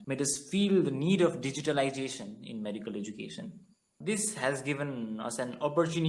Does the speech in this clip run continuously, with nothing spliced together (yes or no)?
no